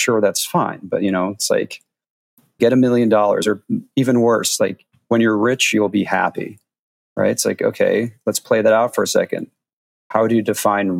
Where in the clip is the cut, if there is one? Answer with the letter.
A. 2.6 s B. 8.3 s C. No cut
A